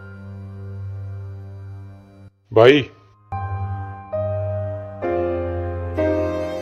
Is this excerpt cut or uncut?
uncut